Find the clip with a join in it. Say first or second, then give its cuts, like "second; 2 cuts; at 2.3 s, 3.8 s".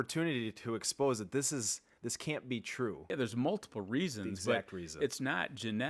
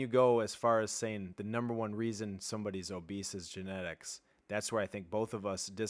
first; 1 cut; at 3.0 s